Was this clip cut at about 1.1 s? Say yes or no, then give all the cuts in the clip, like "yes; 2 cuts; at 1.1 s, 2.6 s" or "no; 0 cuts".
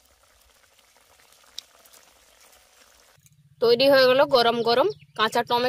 no; 1 cut; at 3.1 s